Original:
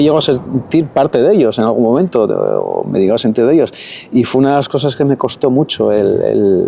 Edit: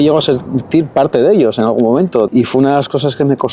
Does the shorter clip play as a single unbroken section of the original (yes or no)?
no